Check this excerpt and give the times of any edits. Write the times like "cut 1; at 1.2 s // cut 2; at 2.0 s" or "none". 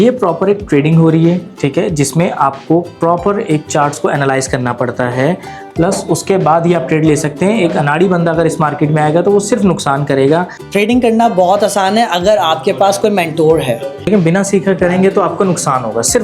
cut 1; at 10.6 s // cut 2; at 14.0 s

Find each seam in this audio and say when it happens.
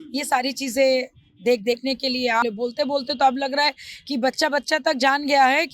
cut 1; at 2.4 s

